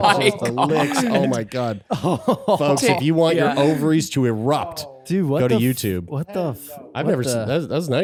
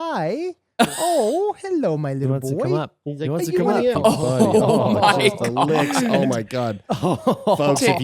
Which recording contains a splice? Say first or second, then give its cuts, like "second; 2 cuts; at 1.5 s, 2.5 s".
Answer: second; 1 cut; at 3.9 s